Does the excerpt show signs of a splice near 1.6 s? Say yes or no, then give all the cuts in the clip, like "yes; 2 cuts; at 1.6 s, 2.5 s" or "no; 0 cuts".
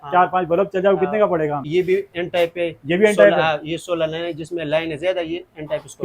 yes; 1 cut; at 1.6 s